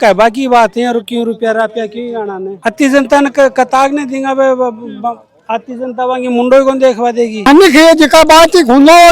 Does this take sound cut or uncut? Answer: cut